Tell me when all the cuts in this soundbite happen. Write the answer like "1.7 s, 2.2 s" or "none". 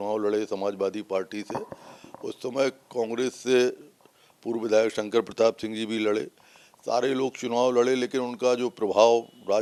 none